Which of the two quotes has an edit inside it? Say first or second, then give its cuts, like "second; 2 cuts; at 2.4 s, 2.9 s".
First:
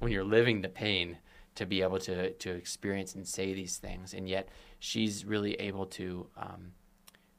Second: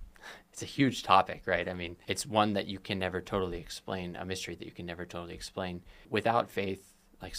second; 2 cuts; at 1.9 s, 5.9 s